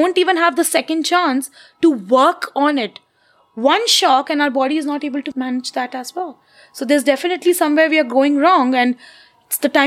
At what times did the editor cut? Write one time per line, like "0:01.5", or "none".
0:05.3